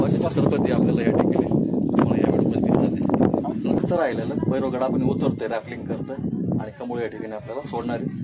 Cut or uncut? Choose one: cut